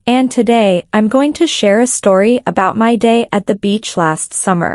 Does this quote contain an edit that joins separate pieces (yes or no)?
yes